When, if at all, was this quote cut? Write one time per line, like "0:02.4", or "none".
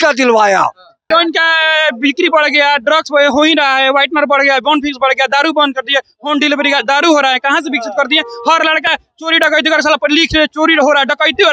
0:01.1